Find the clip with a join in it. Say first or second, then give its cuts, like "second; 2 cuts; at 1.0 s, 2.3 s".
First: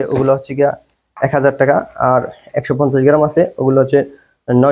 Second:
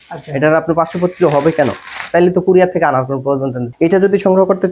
second; 1 cut; at 3.6 s